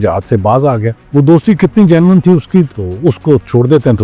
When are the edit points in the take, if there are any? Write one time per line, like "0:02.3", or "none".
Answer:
0:01.0
0:02.7